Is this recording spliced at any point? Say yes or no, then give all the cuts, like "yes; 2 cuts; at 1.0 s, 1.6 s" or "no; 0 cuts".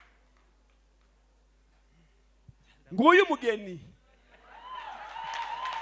no; 0 cuts